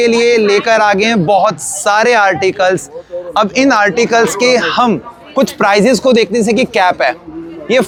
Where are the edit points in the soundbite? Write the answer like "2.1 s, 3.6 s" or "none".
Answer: none